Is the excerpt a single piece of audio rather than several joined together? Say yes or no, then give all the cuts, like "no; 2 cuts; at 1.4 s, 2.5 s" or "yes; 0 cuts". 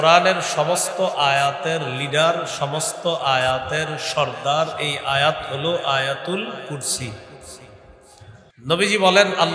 no; 1 cut; at 8.4 s